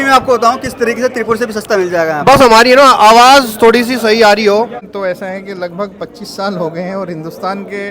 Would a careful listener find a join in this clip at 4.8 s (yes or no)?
yes